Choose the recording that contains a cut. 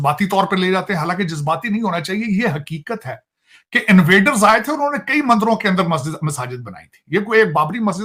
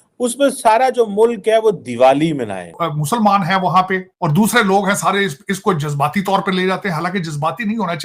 second; 2 cuts; at 2.8 s, 4.1 s

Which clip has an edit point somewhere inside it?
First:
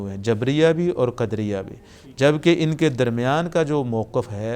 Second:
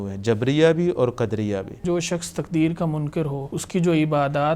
second; 2 cuts; at 1.8 s, 3.5 s

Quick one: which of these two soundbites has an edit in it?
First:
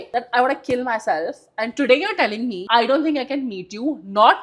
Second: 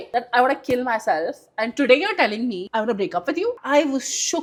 first; 1 cut; at 2.6 s

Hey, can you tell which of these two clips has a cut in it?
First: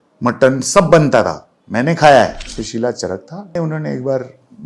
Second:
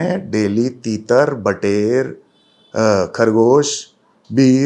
first; 2 cuts; at 2.5 s, 3.6 s

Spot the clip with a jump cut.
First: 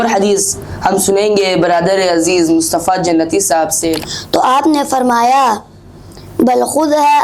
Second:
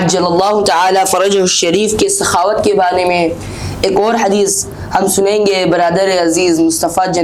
first; 1 cut; at 4.1 s

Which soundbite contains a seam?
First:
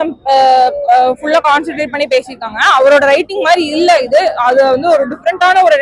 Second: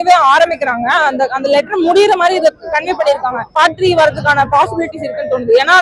second; 1 cut; at 3.5 s

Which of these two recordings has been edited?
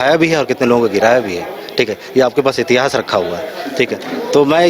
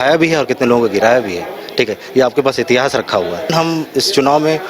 second; 1 cut; at 3.5 s

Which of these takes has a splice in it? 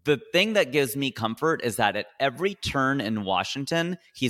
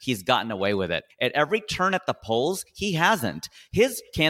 second; 1 cut; at 1.1 s

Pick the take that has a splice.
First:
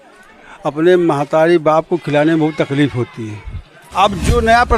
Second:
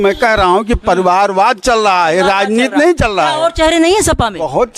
first; 1 cut; at 3.8 s

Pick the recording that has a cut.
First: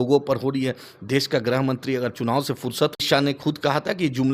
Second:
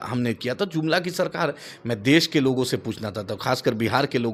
first; 1 cut; at 3.0 s

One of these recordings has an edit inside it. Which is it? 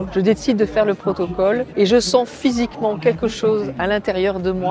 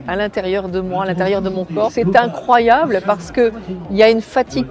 second; 1 cut; at 1.9 s

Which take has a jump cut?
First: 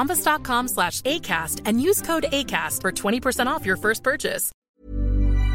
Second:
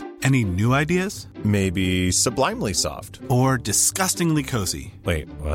first; 1 cut; at 4.5 s

